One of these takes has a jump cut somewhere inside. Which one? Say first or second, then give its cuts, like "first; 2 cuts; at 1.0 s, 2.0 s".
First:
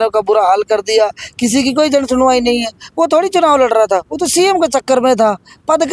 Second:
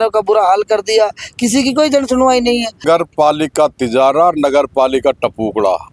second; 1 cut; at 2.8 s